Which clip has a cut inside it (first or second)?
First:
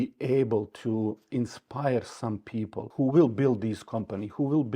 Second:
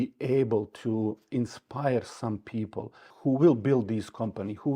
first